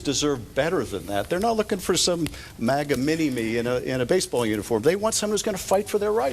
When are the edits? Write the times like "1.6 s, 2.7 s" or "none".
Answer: none